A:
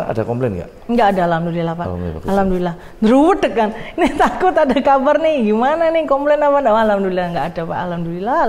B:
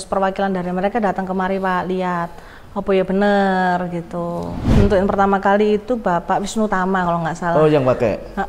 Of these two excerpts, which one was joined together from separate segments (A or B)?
B